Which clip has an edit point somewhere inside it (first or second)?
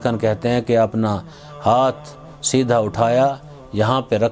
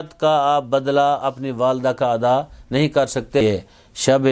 second